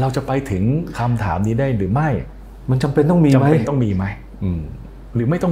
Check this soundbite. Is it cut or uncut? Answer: uncut